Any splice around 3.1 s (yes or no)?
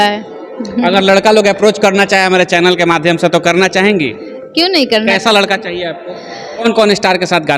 no